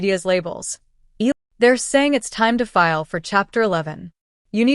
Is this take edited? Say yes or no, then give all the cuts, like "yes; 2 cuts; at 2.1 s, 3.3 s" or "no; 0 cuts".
yes; 1 cut; at 1.3 s